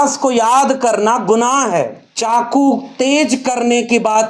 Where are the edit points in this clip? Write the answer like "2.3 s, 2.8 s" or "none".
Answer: 2.0 s

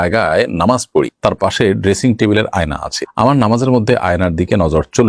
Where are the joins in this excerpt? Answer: none

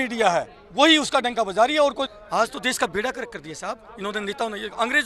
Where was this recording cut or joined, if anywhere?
2.2 s

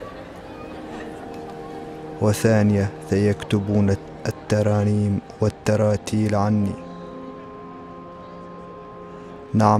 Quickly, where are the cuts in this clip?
1.1 s

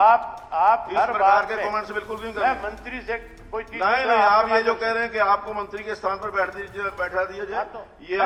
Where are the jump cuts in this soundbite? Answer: none

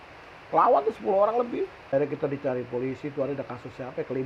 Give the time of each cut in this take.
1.9 s

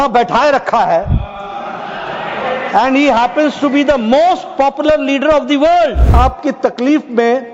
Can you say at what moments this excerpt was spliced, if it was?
6.1 s

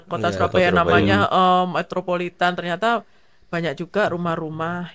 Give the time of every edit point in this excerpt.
none

